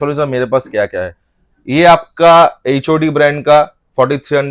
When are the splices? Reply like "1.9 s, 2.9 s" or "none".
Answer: none